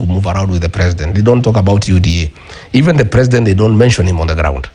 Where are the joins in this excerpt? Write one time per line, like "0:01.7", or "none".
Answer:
none